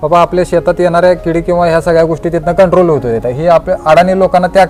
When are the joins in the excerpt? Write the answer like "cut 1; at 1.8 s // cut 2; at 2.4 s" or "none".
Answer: none